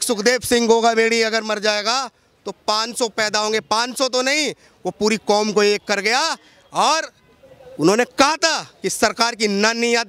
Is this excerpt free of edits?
yes; 0 cuts

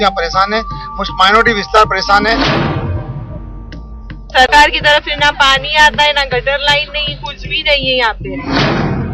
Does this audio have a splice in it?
no; 0 cuts

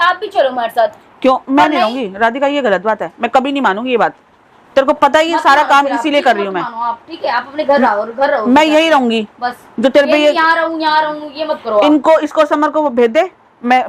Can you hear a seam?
no; 0 cuts

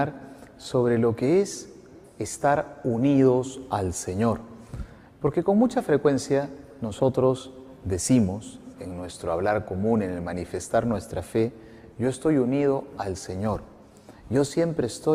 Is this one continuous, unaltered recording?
no; 1 cut; at 6.3 s

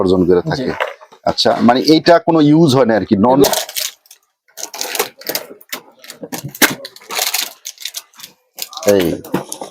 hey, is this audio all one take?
no; 1 cut; at 3.5 s

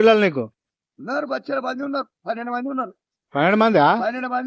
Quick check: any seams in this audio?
no; 0 cuts

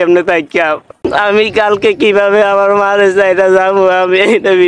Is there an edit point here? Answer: yes; 1 cut; at 1.1 s

